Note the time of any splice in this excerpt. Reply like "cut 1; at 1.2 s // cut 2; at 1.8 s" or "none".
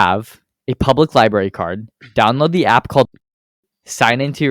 none